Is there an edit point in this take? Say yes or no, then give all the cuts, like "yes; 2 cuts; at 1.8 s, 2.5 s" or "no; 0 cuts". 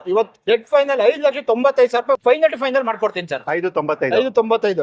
no; 0 cuts